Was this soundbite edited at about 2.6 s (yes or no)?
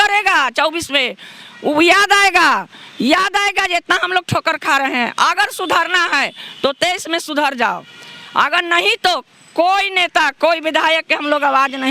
no